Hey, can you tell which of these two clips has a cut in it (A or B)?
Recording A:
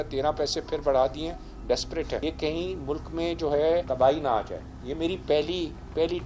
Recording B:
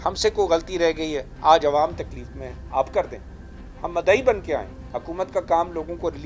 A